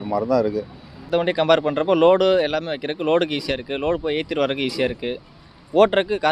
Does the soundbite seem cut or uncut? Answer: cut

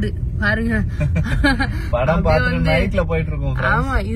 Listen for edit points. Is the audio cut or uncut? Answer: uncut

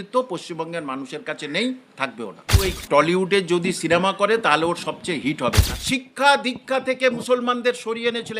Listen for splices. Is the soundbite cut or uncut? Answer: cut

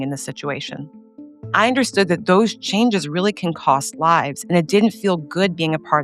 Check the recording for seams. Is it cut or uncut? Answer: cut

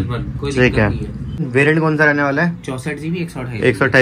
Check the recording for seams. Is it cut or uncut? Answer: cut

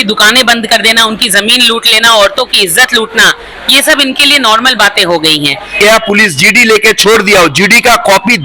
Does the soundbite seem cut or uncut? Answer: cut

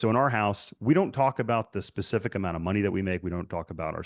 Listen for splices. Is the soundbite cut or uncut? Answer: uncut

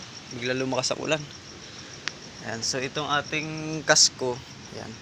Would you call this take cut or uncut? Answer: uncut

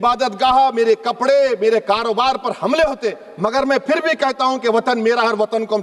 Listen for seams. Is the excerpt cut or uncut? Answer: uncut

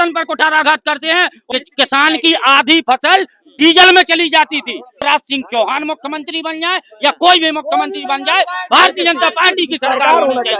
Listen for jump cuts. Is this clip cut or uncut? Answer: cut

